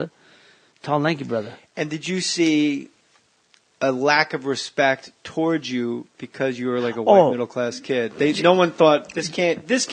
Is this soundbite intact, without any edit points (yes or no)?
no